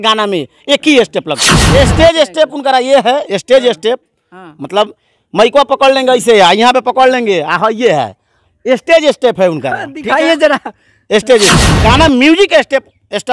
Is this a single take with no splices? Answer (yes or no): no